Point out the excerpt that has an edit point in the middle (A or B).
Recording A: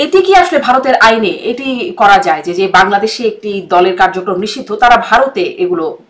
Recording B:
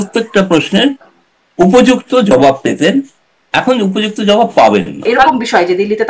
B